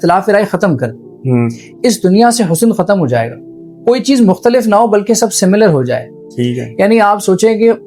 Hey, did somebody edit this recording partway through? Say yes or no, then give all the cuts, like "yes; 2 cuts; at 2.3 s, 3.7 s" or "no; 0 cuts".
no; 0 cuts